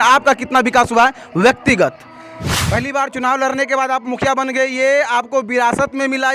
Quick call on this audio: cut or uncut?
cut